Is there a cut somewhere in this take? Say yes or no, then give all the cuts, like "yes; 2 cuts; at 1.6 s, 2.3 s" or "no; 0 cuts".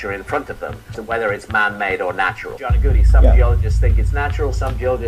no; 0 cuts